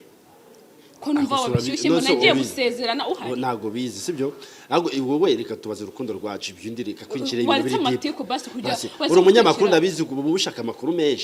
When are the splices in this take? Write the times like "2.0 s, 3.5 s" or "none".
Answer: none